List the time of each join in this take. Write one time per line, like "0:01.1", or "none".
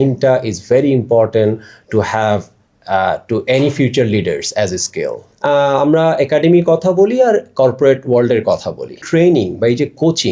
0:05.3
0:09.0